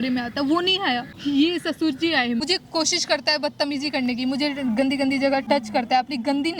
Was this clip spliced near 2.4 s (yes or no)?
yes